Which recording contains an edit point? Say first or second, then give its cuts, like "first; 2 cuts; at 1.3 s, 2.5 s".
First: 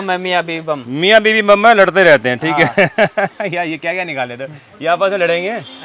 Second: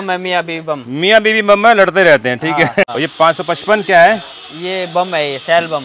second; 1 cut; at 2.9 s